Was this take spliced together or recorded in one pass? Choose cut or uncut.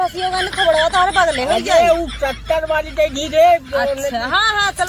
uncut